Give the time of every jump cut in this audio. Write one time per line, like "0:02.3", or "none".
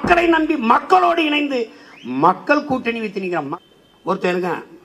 0:03.5